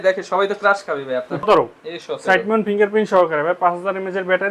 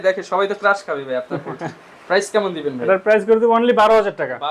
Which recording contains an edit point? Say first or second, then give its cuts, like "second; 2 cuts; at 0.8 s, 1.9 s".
first; 1 cut; at 1.4 s